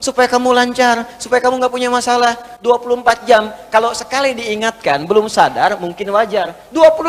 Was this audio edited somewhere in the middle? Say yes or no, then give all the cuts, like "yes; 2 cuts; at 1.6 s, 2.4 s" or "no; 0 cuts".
no; 0 cuts